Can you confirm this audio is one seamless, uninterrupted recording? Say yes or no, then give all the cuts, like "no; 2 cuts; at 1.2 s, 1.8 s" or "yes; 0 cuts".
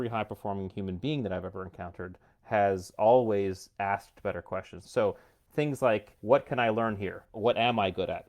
no; 3 cuts; at 4.8 s, 6.1 s, 7.3 s